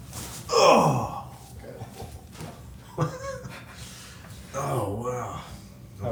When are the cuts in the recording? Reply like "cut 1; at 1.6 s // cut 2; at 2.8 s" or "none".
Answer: none